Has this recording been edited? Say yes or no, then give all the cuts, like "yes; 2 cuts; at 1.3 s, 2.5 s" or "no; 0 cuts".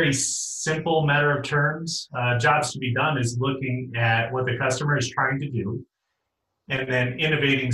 no; 0 cuts